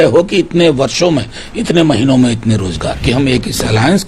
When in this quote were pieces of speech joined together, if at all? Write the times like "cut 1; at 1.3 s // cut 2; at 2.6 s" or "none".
cut 1; at 3.0 s